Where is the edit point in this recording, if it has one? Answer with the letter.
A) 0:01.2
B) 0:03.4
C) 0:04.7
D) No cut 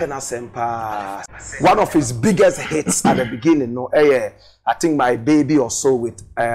A